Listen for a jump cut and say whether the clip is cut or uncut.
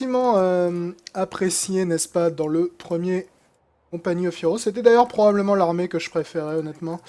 uncut